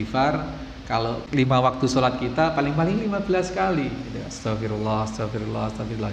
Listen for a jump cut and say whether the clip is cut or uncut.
cut